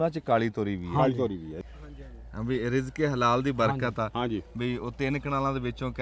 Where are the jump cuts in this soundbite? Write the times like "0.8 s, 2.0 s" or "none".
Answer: 1.6 s